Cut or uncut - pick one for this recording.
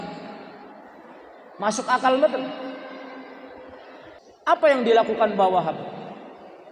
cut